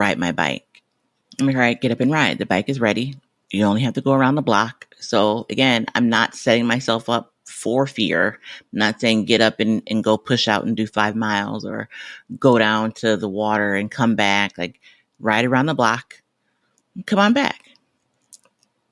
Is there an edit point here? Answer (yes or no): no